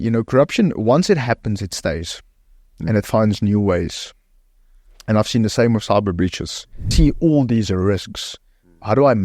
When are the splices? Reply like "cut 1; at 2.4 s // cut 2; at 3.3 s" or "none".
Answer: cut 1; at 6.9 s